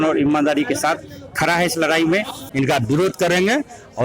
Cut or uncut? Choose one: cut